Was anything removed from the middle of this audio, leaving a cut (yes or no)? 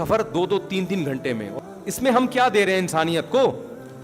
yes